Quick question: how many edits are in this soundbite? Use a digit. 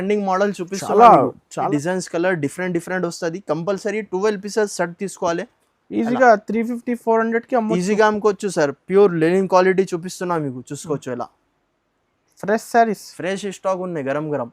1